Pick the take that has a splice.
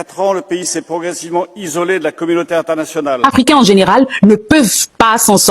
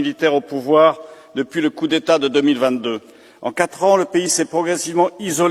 first; 1 cut; at 3.3 s

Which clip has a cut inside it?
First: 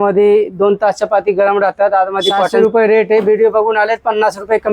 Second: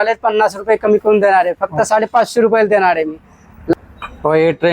first; 1 cut; at 2.5 s

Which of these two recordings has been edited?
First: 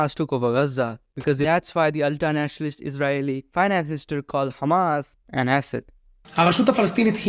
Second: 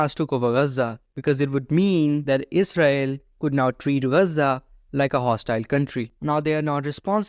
first; 1 cut; at 1.5 s

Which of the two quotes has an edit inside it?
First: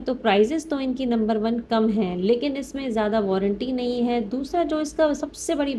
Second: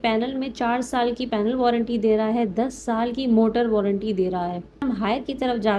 second; 1 cut; at 4.8 s

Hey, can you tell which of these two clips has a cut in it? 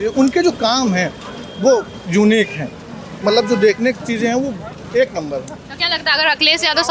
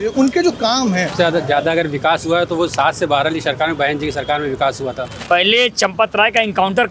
second; 2 cuts; at 1.1 s, 5.1 s

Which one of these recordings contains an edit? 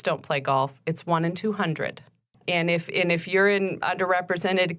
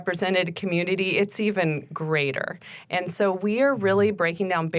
first; 1 cut; at 2.3 s

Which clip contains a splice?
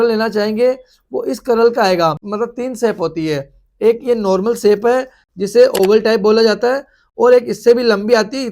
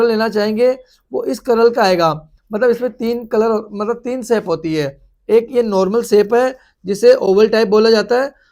first; 1 cut; at 2.2 s

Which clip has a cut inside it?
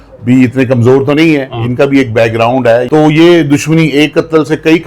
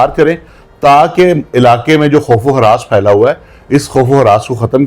first; 1 cut; at 2.9 s

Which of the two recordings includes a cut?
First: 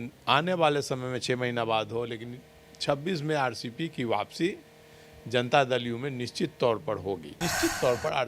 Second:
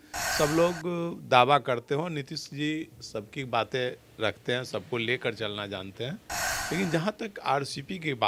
first; 1 cut; at 7.3 s

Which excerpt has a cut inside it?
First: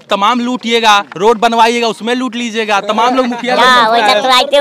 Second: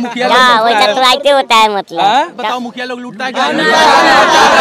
second; 1 cut; at 2.4 s

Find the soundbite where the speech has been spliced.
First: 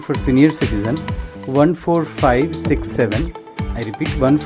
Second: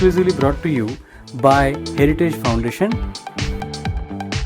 second; 1 cut; at 3.2 s

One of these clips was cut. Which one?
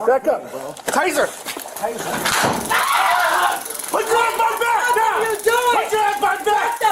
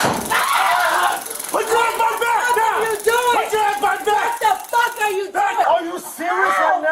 second; 1 cut; at 5.6 s

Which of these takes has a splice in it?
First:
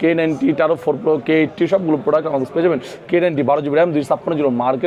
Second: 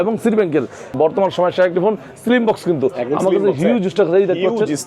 second; 1 cut; at 0.9 s

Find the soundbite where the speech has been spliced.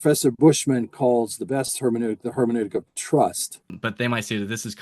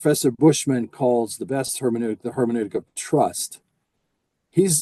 first; 1 cut; at 3.8 s

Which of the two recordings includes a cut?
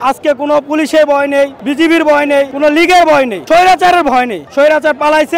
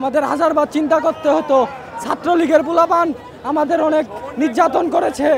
first; 4 cuts; at 1.6 s, 2.5 s, 3.4 s, 4.4 s

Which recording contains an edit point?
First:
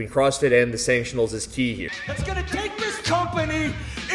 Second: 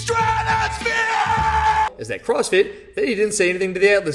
second; 1 cut; at 2.0 s

